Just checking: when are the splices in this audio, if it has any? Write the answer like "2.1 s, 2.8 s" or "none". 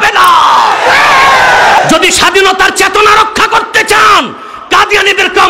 1.8 s